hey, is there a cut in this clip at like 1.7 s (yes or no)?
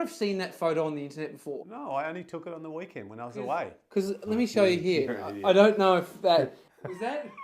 yes